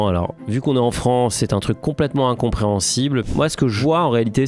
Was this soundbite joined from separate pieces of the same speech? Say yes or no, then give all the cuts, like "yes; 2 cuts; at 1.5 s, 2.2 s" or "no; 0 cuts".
yes; 1 cut; at 3.6 s